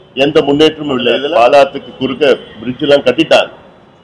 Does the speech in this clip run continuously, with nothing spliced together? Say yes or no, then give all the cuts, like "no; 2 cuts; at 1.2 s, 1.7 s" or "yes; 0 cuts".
no; 1 cut; at 1.2 s